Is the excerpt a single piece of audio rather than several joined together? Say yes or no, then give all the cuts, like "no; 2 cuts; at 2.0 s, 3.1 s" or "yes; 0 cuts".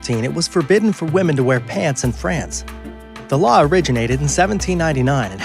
no; 1 cut; at 1.7 s